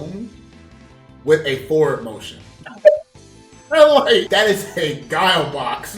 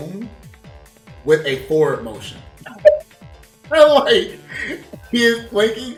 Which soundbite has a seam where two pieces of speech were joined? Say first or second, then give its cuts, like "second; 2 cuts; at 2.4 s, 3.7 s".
first; 1 cut; at 4.3 s